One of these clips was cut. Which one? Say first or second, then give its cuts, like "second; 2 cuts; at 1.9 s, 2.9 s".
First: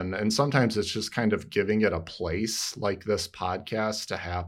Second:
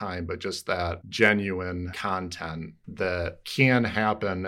second; 3 cuts; at 1.0 s, 2.0 s, 3.4 s